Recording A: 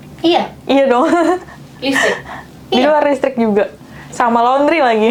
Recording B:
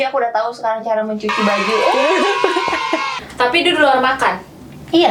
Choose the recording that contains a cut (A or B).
B